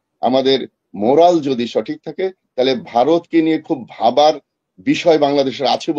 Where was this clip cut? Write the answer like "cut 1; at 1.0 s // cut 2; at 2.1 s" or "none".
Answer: none